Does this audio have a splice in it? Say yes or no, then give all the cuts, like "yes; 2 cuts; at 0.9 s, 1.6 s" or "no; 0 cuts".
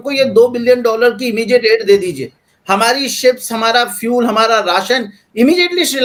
no; 0 cuts